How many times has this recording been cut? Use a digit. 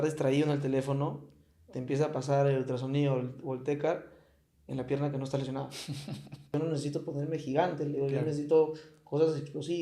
1